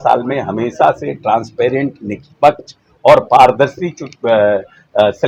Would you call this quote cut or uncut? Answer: uncut